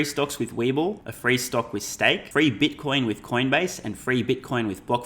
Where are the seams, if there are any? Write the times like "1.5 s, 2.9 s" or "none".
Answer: 1.1 s, 2.2 s